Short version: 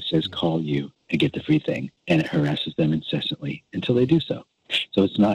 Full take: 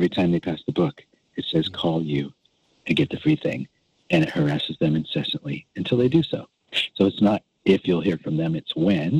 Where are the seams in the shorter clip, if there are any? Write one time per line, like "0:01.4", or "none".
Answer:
0:01.0
0:01.9